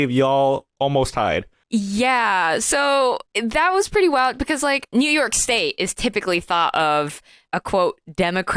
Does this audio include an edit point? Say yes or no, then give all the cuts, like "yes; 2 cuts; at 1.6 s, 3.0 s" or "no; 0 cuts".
yes; 4 cuts; at 1.5 s, 3.3 s, 4.9 s, 7.4 s